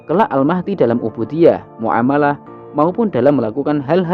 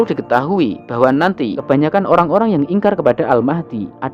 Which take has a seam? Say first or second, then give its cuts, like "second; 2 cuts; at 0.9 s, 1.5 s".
second; 1 cut; at 1.6 s